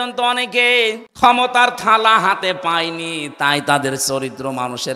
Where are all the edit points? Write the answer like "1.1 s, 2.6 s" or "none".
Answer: 1.0 s